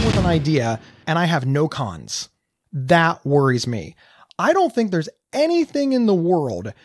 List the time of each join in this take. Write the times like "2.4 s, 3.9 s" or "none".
0.9 s